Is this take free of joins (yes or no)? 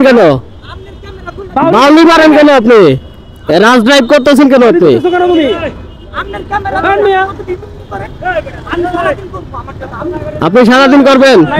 yes